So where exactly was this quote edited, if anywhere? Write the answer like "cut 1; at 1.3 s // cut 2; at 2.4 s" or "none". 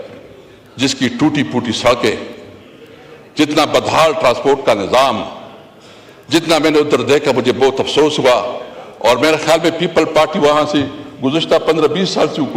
none